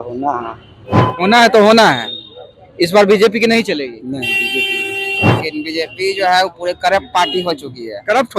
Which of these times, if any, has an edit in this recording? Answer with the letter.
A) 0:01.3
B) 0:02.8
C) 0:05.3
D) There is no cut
C